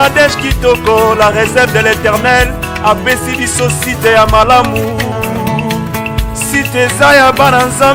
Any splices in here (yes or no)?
no